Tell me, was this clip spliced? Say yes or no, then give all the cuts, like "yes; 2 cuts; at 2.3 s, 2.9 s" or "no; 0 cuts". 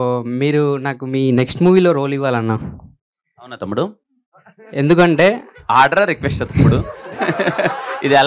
no; 0 cuts